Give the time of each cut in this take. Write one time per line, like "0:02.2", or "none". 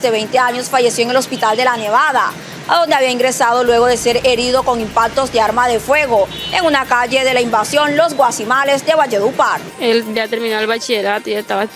0:09.7